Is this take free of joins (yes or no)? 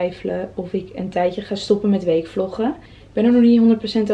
yes